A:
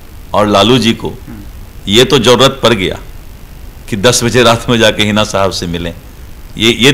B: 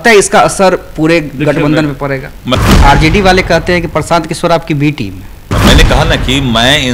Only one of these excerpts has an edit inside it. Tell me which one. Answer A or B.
B